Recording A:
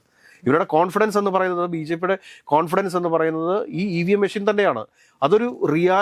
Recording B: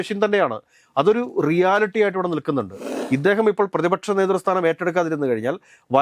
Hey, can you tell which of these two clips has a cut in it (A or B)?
B